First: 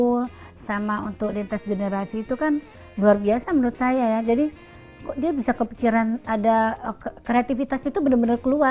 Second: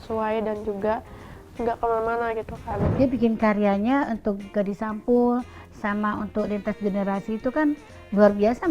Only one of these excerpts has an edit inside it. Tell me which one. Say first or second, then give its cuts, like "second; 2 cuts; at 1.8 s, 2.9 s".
second; 1 cut; at 2.7 s